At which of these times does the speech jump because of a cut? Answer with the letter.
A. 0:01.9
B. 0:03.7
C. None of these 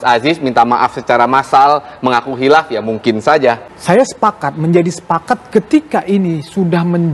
B